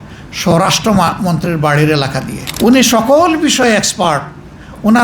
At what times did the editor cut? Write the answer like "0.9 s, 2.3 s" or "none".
2.4 s